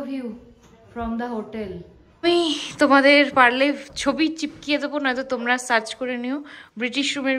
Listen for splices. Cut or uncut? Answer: cut